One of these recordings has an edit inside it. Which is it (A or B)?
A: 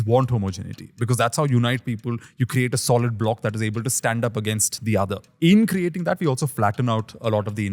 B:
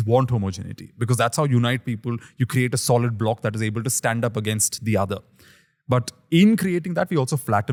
A